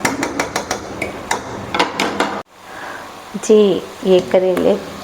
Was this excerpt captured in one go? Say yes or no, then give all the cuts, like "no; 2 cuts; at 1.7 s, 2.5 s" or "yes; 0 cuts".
no; 1 cut; at 2.5 s